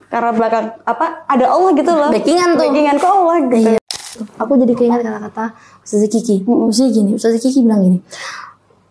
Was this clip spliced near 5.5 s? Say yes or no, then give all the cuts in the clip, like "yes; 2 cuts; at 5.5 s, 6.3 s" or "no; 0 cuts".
no; 1 cut; at 3.8 s